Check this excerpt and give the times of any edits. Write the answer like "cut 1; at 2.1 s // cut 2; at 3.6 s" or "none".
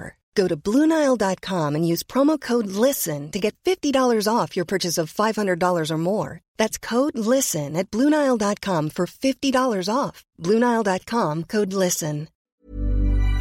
cut 1; at 12.4 s